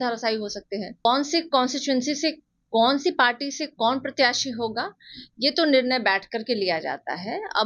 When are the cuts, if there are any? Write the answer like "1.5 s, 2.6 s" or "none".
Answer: 1.0 s

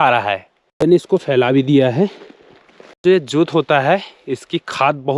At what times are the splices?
0.9 s, 3.0 s

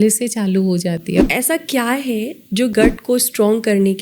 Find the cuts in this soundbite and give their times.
1.2 s, 2.7 s

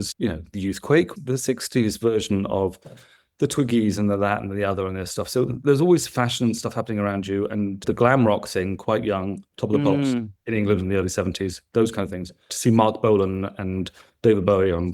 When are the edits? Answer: 1.1 s, 12.4 s

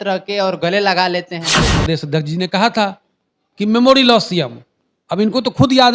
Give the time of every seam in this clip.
1.7 s

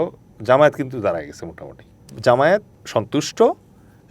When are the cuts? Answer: 2.1 s, 2.8 s

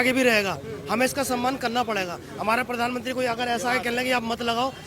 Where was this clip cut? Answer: none

